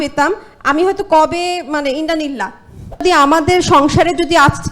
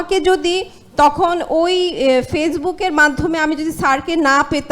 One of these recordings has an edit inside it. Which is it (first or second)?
first